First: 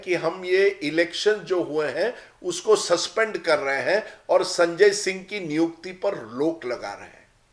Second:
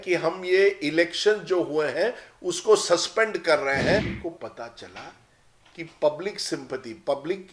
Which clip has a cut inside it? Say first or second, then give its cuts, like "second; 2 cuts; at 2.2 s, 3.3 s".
second; 1 cut; at 4.1 s